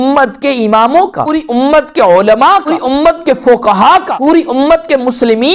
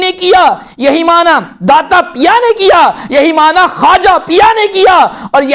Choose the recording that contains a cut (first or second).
first